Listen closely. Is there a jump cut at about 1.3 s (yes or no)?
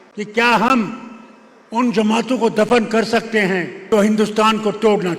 no